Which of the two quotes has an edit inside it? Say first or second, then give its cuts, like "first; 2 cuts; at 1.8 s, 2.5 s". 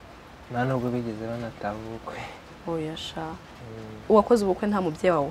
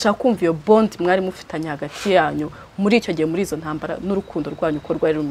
first; 1 cut; at 4.0 s